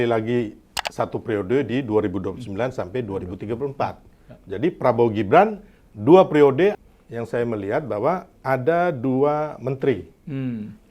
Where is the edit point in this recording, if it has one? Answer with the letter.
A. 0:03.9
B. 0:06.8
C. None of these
B